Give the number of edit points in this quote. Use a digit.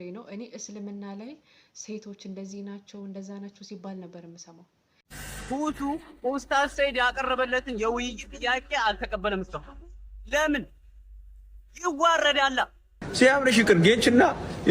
2